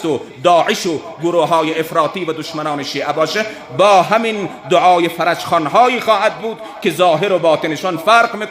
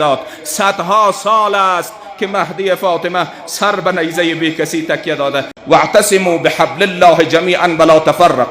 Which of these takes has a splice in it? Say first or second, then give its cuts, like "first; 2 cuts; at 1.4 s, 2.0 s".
second; 1 cut; at 5.8 s